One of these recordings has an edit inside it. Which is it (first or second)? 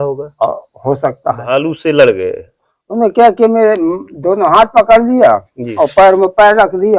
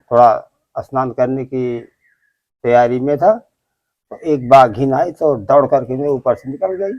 first